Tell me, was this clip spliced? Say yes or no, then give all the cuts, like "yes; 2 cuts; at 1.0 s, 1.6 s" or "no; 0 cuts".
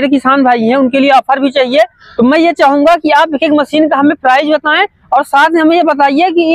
no; 0 cuts